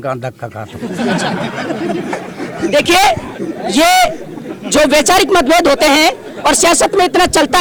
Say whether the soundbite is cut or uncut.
uncut